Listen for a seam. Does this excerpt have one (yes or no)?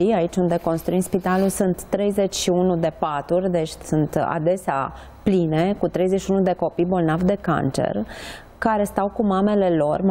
no